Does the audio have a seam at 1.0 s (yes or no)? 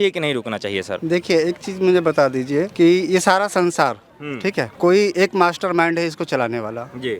yes